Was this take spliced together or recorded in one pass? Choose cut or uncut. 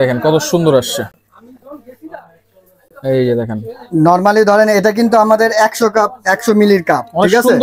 uncut